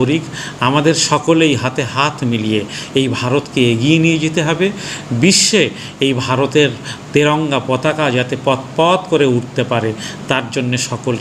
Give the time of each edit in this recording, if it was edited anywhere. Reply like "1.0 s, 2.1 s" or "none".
none